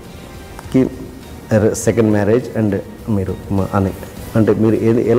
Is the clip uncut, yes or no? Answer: yes